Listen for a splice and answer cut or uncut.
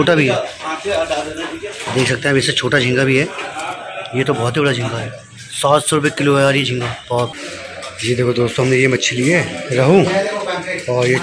cut